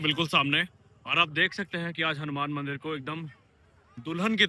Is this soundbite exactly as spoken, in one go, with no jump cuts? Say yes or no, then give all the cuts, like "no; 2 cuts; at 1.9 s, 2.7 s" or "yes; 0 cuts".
yes; 0 cuts